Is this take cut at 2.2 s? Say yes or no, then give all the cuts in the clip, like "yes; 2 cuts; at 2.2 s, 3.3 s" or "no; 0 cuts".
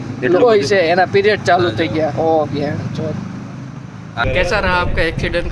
no; 1 cut; at 4.2 s